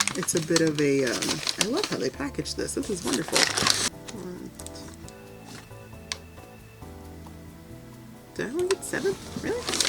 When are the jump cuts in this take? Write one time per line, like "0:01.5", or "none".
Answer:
0:03.9

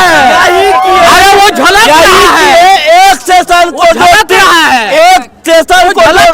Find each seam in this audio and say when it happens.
none

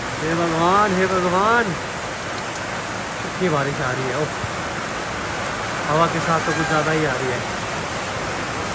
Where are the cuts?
none

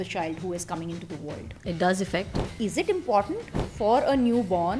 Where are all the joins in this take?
0:01.5
0:02.4

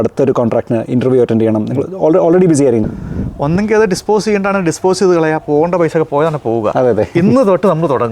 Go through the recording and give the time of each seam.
0:02.8

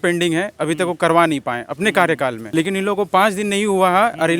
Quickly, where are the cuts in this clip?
0:02.4

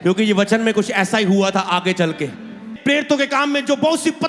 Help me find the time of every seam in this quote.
0:02.7

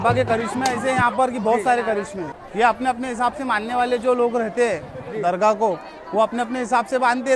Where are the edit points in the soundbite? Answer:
0:02.3

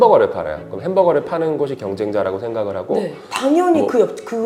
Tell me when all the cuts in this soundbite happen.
none

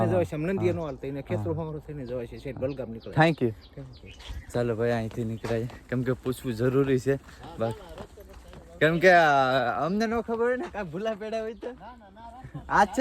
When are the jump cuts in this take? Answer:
none

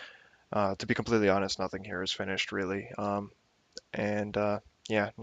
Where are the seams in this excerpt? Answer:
0:01.5

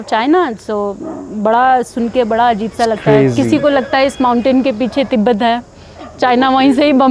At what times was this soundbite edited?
none

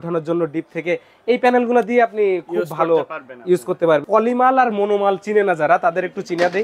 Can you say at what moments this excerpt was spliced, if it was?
0:04.0

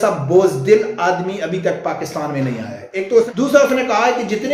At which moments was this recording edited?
0:03.3

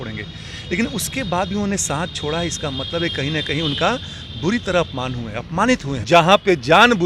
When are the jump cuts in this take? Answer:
0:05.9

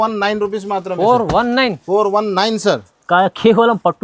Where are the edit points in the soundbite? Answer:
none

